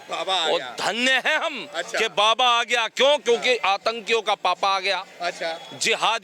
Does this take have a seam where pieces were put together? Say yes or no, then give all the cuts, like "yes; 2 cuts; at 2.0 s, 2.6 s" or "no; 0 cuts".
no; 0 cuts